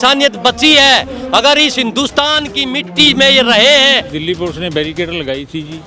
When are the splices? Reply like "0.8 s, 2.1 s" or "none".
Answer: 4.1 s